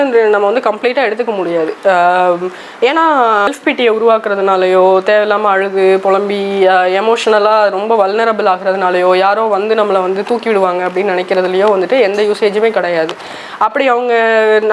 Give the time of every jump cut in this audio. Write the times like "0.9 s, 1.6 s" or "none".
3.5 s